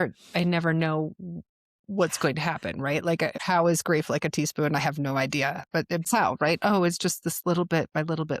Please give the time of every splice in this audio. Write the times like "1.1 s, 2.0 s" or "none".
3.4 s, 6.0 s